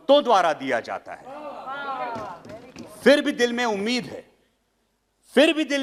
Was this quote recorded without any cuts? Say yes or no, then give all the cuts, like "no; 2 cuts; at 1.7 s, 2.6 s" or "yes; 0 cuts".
yes; 0 cuts